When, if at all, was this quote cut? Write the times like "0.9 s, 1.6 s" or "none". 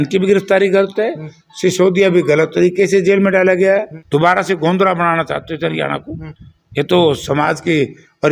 4.0 s